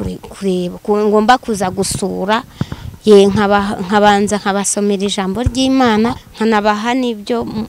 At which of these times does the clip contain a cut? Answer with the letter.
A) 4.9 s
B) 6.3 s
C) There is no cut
B